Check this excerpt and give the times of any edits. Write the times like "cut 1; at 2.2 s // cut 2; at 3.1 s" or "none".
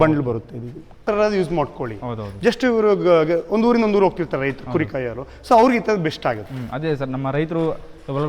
cut 1; at 1.0 s